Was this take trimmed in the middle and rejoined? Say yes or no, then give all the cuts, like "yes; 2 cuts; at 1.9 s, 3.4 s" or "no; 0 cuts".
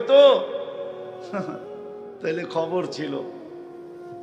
yes; 1 cut; at 3.3 s